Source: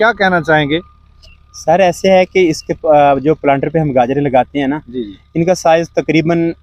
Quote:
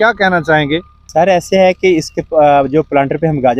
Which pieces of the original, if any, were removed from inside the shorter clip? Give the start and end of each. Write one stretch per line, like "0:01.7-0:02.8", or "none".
0:01.0-0:01.5